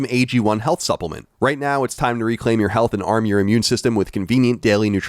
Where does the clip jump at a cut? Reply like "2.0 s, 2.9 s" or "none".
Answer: 1.2 s